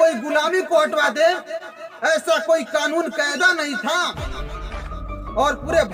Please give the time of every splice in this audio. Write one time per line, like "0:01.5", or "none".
none